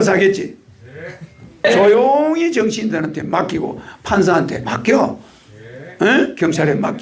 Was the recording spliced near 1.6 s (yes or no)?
yes